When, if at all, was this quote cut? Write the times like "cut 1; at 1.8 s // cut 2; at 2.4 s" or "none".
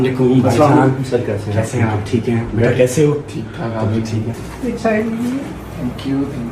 cut 1; at 4.4 s